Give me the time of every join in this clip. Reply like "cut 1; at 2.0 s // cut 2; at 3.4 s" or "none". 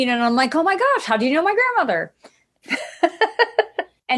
none